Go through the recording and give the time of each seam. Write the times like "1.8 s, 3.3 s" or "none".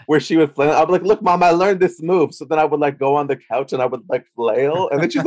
none